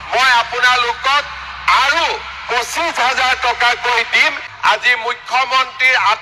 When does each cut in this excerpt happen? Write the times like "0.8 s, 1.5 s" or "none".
4.5 s